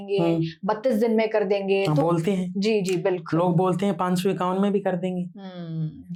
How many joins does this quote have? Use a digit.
0